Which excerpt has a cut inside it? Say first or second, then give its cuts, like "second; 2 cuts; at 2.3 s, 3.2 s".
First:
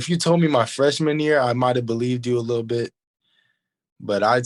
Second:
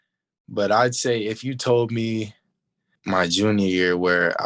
second; 1 cut; at 3.0 s